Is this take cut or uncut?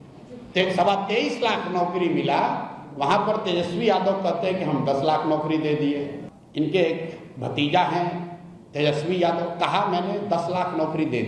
cut